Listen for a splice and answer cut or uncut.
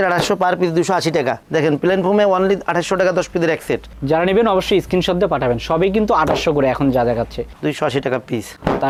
uncut